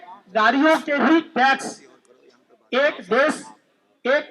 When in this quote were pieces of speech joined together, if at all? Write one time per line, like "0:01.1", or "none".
none